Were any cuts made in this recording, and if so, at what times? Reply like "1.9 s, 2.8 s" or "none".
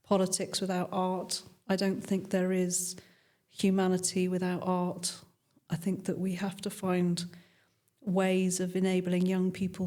none